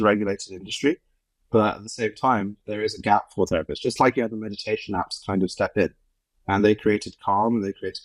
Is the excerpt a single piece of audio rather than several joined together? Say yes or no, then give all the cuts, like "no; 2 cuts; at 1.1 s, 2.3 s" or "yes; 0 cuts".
yes; 0 cuts